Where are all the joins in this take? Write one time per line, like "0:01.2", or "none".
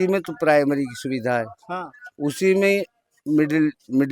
none